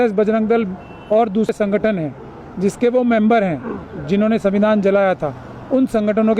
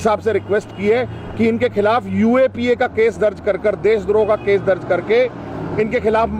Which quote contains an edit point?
first; 1 cut; at 1.5 s

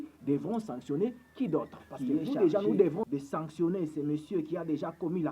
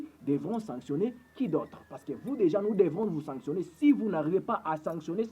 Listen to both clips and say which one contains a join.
first; 1 cut; at 3.1 s

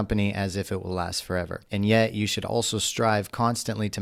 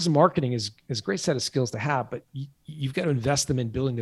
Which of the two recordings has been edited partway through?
first; 1 cut; at 1.6 s

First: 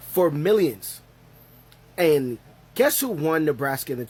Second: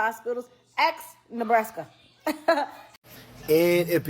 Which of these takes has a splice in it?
second; 1 cut; at 2.8 s

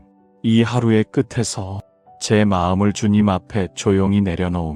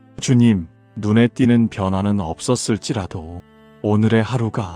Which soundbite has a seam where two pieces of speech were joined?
second; 1 cut; at 0.9 s

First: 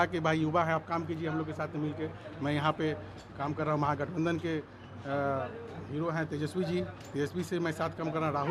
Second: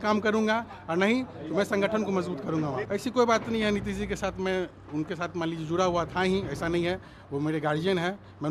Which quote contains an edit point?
second; 1 cut; at 2.9 s

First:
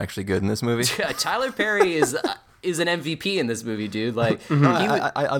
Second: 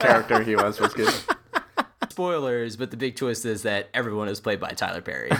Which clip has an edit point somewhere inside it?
second; 1 cut; at 2.1 s

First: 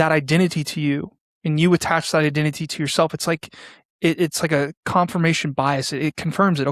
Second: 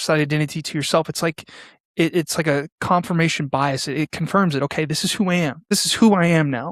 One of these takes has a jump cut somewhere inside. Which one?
second; 1 cut; at 5.7 s

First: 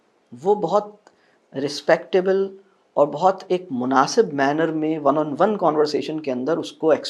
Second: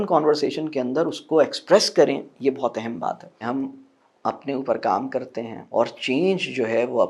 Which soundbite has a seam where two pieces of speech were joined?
second; 2 cuts; at 3.3 s, 5.6 s

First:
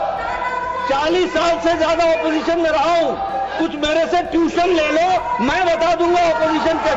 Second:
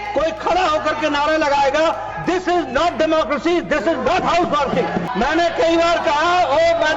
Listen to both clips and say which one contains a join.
second; 1 cut; at 5.1 s

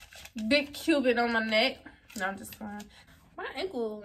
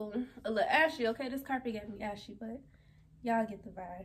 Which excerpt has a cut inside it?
first; 1 cut; at 3.0 s

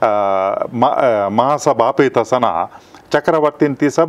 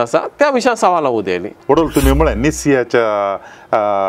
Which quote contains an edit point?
second; 1 cut; at 1.5 s

